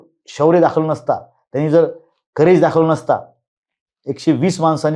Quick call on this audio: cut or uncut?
uncut